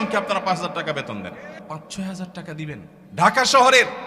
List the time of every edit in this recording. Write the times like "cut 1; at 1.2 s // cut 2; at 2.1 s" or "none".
cut 1; at 1.6 s // cut 2; at 3.0 s

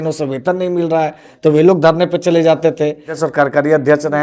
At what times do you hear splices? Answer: cut 1; at 3.2 s

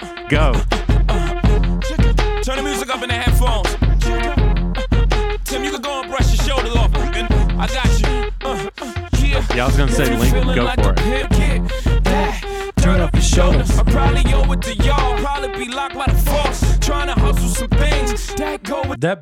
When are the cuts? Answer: none

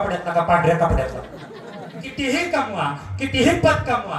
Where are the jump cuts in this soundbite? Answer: cut 1; at 2.3 s

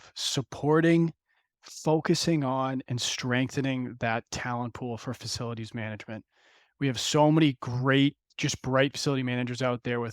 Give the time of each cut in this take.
cut 1; at 8.3 s

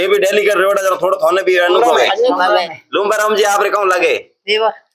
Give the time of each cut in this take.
cut 1; at 2.7 s

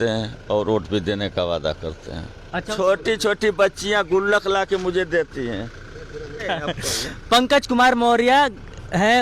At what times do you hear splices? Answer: cut 1; at 2.7 s // cut 2; at 6.4 s

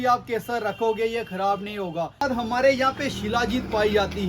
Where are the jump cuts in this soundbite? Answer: cut 1; at 2.2 s

